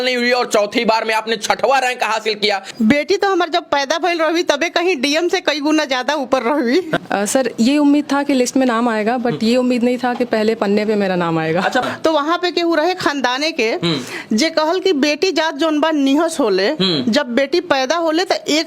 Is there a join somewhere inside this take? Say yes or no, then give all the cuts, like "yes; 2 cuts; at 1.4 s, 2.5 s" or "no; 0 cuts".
yes; 3 cuts; at 2.7 s, 7.0 s, 11.9 s